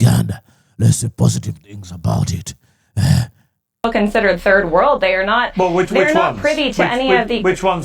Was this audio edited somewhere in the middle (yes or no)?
yes